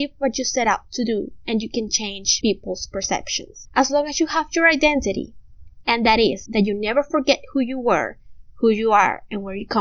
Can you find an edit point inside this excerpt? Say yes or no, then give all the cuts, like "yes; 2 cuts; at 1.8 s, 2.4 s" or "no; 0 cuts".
no; 0 cuts